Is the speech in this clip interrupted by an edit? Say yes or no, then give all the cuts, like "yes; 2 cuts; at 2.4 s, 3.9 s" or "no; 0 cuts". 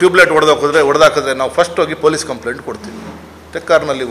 no; 0 cuts